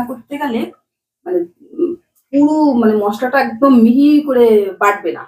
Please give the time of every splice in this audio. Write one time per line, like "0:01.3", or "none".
none